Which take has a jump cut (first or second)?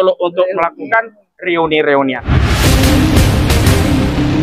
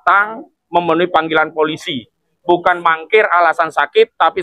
first